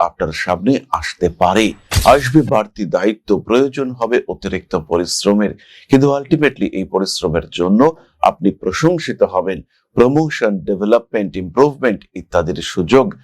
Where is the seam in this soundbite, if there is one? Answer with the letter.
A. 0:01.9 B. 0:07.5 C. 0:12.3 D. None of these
A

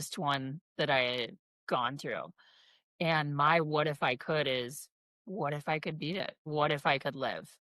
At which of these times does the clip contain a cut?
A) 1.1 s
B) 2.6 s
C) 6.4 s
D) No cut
C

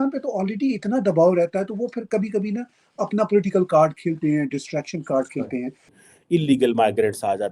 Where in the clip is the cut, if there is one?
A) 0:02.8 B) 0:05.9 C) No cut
B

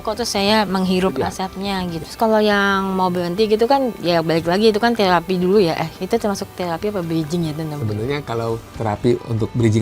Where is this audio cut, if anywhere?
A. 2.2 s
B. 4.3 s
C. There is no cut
A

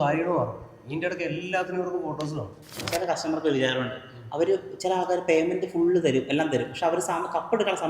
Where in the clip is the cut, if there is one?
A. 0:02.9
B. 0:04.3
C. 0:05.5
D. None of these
A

